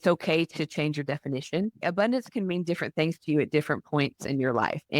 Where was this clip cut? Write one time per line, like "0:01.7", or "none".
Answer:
0:01.8